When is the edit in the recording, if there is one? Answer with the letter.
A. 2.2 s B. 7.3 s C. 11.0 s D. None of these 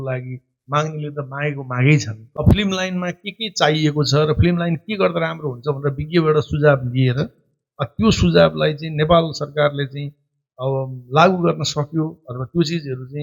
A